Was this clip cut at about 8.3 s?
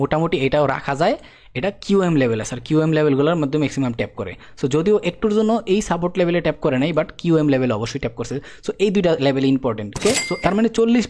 no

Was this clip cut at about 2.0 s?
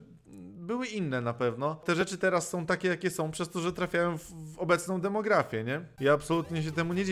yes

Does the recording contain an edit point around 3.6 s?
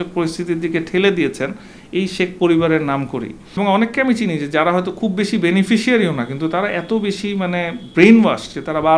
yes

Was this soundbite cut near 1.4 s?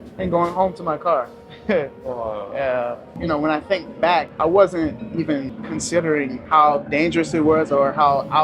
no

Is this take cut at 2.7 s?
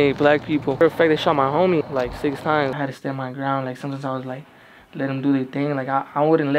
yes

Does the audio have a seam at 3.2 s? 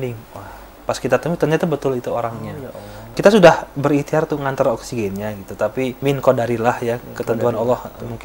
yes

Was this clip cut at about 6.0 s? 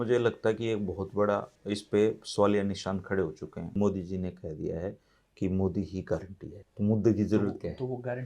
no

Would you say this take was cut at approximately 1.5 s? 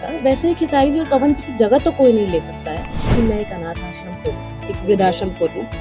no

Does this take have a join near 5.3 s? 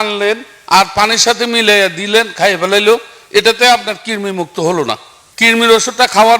yes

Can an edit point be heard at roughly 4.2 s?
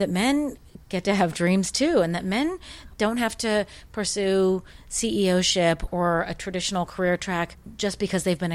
no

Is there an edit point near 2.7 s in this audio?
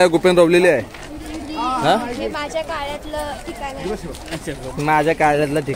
no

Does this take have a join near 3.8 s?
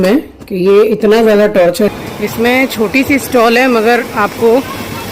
no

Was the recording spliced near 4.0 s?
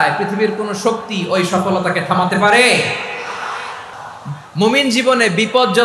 yes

